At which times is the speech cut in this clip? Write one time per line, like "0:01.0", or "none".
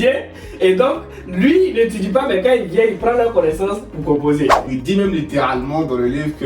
0:04.7